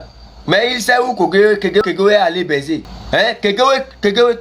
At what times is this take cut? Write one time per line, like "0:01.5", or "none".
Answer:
none

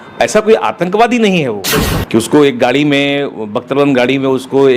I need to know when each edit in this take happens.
0:01.8

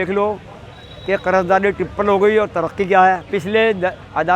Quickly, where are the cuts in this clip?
0:03.3

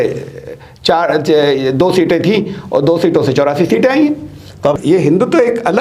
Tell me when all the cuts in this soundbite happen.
0:04.8

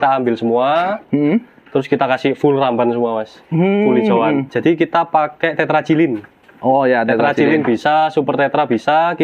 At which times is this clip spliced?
0:04.5

